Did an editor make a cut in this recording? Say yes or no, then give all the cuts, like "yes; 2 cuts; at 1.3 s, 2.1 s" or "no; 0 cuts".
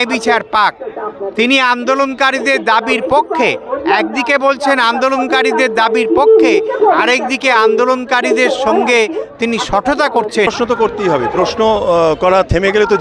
yes; 1 cut; at 10.5 s